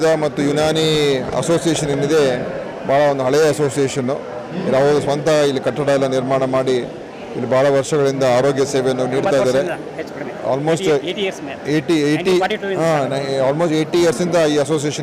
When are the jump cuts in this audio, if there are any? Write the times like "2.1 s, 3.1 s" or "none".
none